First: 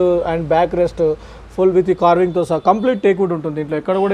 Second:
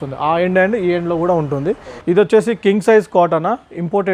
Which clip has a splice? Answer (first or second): second